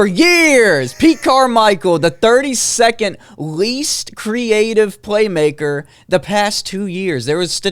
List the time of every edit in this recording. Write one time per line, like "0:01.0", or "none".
none